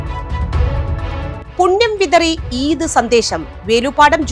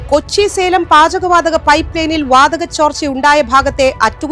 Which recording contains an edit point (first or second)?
first